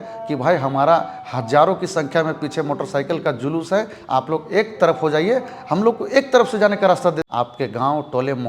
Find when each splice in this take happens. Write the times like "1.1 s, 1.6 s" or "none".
7.2 s